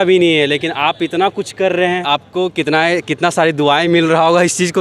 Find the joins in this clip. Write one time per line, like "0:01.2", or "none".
0:02.0